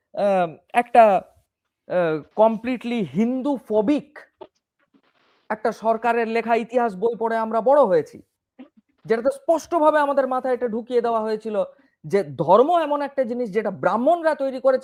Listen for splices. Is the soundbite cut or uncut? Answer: uncut